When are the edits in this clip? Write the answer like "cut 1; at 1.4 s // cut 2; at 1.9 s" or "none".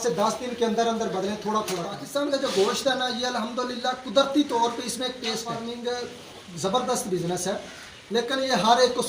cut 1; at 2.0 s // cut 2; at 5.6 s